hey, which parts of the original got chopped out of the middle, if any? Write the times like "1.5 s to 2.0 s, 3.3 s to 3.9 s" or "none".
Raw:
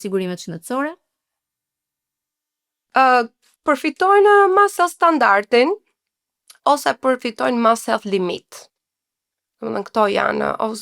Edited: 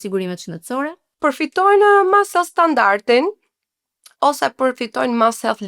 1.0 s to 3.5 s